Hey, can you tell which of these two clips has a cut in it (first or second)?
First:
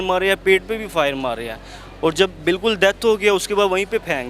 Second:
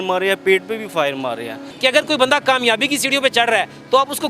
second